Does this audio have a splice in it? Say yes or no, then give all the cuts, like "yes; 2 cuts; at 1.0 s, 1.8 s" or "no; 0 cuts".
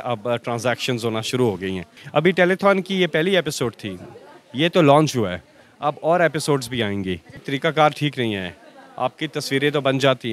yes; 2 cuts; at 1.9 s, 7.4 s